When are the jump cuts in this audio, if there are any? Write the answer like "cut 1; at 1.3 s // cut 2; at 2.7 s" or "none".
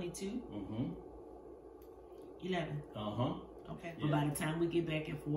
cut 1; at 3.8 s